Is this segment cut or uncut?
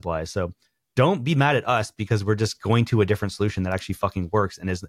uncut